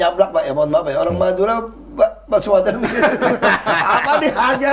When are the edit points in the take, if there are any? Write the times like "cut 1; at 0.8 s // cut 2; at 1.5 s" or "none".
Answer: none